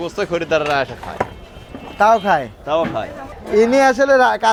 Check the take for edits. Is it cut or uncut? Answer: uncut